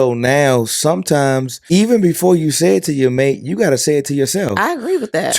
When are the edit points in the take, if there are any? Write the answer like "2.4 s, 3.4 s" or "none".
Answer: 1.5 s